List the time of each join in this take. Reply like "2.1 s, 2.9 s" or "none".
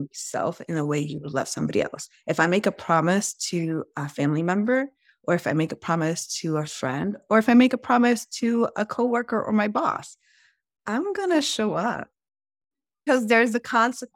13.0 s